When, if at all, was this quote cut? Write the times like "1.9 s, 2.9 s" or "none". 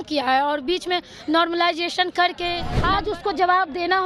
2.7 s